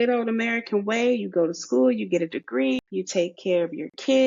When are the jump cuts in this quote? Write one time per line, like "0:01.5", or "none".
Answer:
0:02.9